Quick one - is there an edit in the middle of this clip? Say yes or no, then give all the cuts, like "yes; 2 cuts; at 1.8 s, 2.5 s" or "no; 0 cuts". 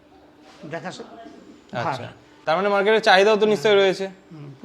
yes; 1 cut; at 2.2 s